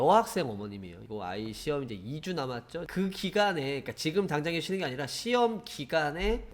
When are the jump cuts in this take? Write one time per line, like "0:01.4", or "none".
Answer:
0:01.0
0:02.9